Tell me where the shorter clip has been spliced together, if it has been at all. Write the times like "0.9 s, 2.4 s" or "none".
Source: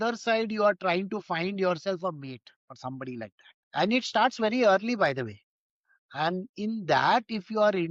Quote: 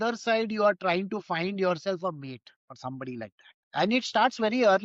none